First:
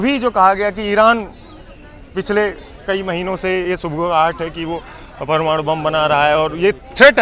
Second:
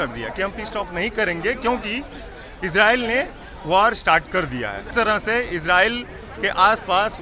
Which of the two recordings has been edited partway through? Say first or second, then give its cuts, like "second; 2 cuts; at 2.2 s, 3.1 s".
second; 1 cut; at 4.9 s